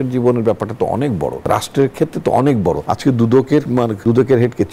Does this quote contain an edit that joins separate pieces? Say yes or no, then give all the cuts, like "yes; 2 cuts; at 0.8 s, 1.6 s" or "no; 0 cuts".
yes; 3 cuts; at 1.4 s, 2.9 s, 3.8 s